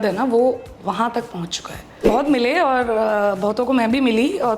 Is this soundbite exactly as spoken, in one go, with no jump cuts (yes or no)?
no